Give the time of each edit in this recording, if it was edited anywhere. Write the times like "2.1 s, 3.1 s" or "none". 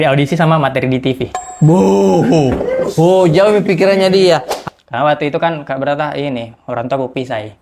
4.5 s